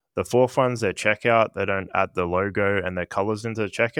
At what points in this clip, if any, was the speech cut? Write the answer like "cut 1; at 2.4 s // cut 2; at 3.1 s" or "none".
none

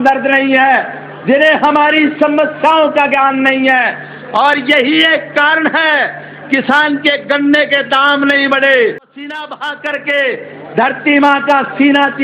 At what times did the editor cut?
cut 1; at 9.2 s

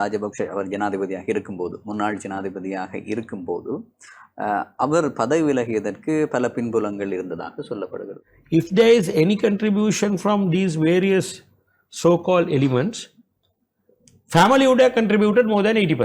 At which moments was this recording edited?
cut 1; at 8.1 s

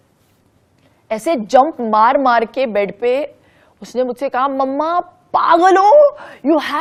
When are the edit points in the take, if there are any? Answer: none

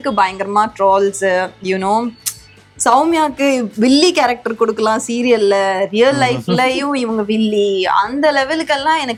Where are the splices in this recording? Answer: none

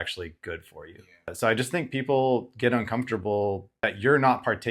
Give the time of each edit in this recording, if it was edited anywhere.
cut 1; at 3.7 s

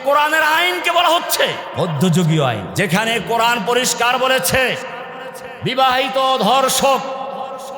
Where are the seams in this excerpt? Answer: cut 1; at 1.7 s // cut 2; at 2.7 s

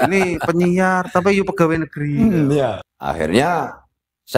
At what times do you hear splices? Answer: cut 1; at 2.9 s

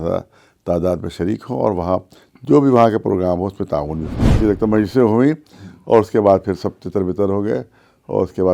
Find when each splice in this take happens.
cut 1; at 4.4 s

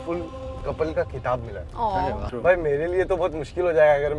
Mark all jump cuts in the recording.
cut 1; at 2.2 s

